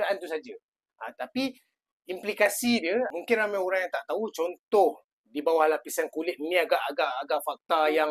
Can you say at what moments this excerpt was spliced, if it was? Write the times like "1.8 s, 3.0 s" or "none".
3.1 s